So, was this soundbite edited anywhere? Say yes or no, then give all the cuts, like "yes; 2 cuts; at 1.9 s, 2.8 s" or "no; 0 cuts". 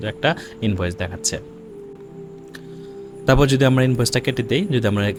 no; 0 cuts